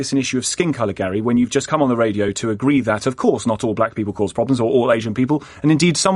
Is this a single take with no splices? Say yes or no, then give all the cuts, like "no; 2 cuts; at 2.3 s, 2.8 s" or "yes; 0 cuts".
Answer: yes; 0 cuts